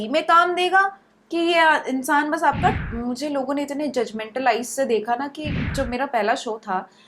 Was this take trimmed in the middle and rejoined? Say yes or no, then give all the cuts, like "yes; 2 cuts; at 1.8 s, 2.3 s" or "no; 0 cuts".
yes; 2 cuts; at 2.8 s, 5.7 s